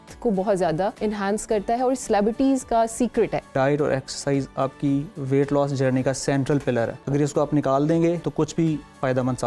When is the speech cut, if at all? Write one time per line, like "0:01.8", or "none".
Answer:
0:01.0
0:03.5
0:07.0
0:08.2